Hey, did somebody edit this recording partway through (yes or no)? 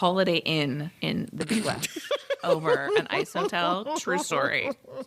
yes